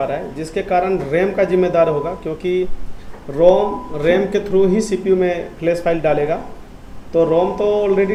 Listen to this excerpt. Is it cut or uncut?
uncut